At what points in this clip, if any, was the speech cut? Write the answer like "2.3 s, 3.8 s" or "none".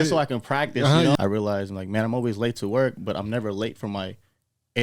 1.1 s